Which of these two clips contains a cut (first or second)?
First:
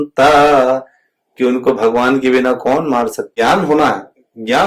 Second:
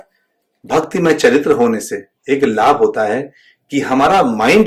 first